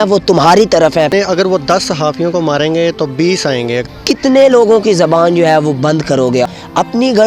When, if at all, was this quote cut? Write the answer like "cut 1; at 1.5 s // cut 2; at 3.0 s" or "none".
cut 1; at 1.1 s // cut 2; at 3.9 s // cut 3; at 6.5 s

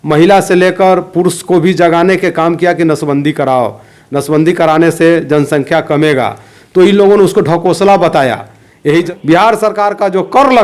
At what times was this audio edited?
cut 1; at 9.1 s

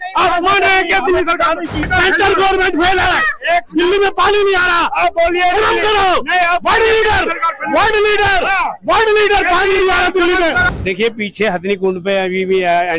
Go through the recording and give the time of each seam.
cut 1; at 1.8 s // cut 2; at 10.6 s

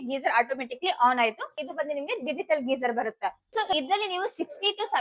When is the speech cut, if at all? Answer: cut 1; at 1.6 s // cut 2; at 3.6 s

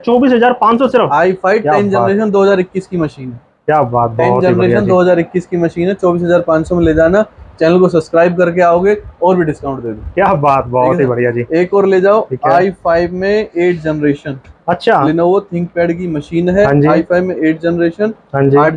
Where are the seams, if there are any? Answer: none

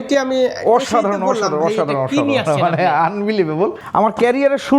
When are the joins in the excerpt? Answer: cut 1; at 3.8 s

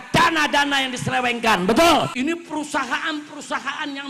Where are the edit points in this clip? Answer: cut 1; at 2.1 s

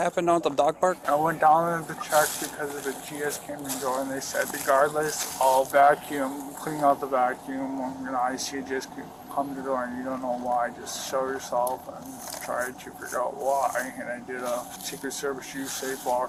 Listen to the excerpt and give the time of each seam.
none

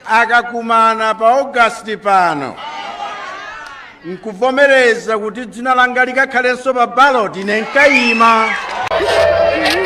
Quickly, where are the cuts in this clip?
cut 1; at 8.7 s

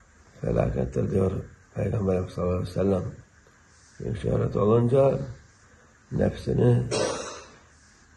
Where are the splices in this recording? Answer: cut 1; at 1.9 s

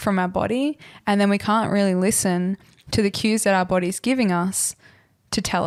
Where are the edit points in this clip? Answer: none

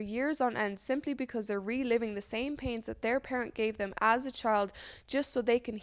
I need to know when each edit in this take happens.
none

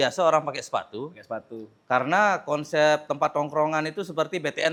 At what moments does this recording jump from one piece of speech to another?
none

